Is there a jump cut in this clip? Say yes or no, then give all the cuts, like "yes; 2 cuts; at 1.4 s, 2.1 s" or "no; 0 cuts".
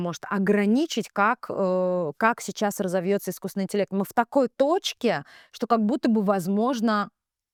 no; 0 cuts